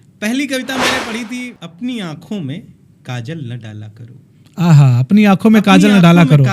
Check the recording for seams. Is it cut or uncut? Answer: cut